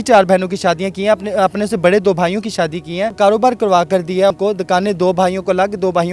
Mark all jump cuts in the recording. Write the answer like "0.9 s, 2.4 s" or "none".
3.1 s, 4.3 s